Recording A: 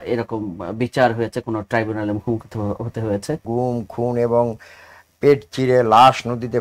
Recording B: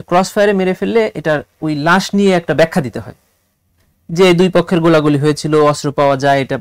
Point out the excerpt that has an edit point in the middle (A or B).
A